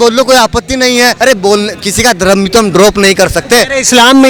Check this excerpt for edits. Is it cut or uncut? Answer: uncut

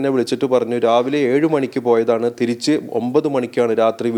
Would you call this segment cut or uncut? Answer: uncut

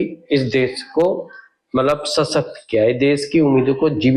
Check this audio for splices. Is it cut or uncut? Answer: uncut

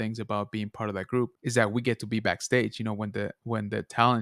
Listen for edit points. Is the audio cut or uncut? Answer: cut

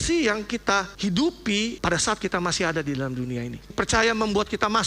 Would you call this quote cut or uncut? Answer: cut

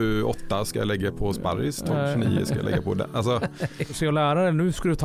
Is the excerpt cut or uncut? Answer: cut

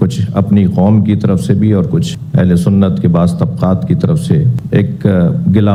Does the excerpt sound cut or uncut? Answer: uncut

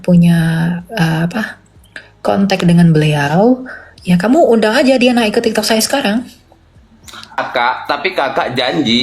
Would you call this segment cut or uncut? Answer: cut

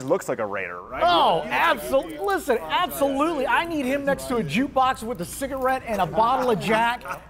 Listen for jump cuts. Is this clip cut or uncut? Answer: uncut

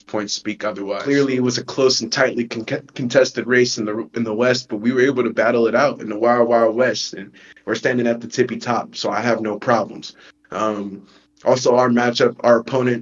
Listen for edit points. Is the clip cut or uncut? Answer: cut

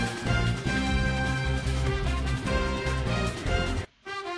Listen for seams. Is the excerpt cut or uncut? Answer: cut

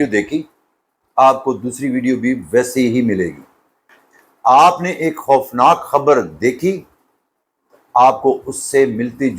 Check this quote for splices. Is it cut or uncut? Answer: uncut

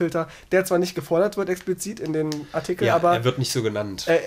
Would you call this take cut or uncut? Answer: uncut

